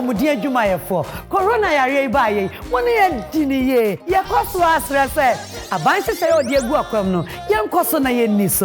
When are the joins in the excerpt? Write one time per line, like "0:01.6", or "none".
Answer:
none